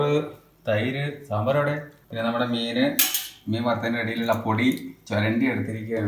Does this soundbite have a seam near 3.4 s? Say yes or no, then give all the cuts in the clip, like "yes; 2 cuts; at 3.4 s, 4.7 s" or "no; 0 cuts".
no; 1 cut; at 2.0 s